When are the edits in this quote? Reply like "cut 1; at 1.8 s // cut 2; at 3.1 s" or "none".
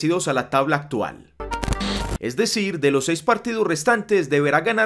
cut 1; at 1.6 s